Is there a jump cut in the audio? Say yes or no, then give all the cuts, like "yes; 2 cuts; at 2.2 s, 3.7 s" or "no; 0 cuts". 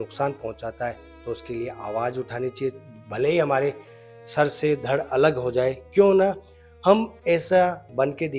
no; 0 cuts